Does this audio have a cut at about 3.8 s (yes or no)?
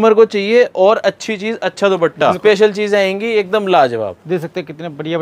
no